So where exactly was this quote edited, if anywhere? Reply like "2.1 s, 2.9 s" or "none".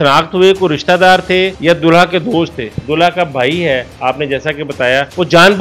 2.8 s